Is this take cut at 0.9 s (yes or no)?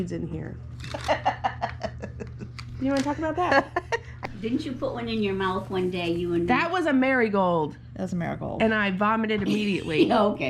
no